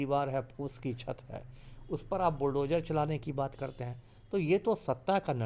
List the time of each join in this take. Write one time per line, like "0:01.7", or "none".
none